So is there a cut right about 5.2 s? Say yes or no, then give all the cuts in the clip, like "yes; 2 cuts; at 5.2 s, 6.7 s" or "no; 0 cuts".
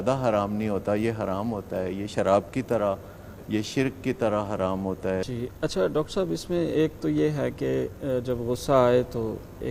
no; 0 cuts